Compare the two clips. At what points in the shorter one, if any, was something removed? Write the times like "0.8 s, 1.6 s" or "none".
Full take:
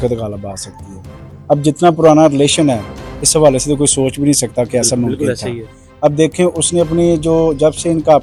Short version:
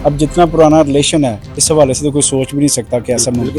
1.5 s